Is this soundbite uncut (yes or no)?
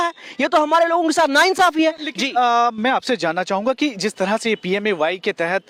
yes